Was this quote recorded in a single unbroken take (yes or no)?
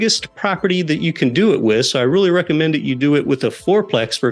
yes